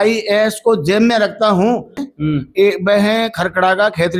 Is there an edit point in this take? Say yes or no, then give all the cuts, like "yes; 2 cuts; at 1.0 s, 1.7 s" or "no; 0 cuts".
yes; 1 cut; at 2.0 s